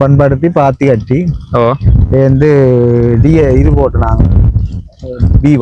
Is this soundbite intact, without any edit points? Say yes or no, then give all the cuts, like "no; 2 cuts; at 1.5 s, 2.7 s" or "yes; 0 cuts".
yes; 0 cuts